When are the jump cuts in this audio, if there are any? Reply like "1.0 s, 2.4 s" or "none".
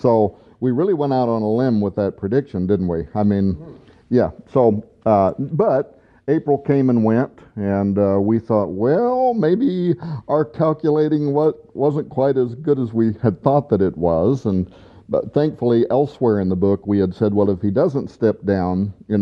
7.4 s